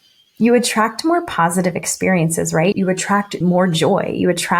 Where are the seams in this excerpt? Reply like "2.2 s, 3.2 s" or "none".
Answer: 3.3 s